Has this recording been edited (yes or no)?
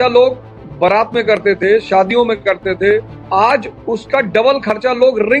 no